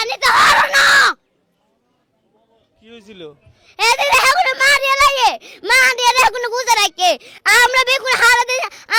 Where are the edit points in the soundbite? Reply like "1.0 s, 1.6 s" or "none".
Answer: none